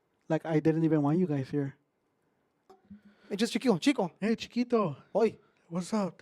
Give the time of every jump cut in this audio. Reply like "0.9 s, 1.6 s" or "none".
2.9 s